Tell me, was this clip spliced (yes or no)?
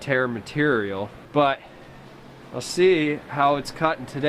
yes